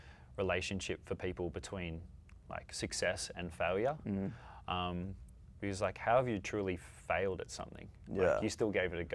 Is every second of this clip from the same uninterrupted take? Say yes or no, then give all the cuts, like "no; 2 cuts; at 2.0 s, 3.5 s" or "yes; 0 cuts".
yes; 0 cuts